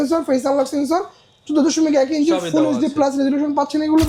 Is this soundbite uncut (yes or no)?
yes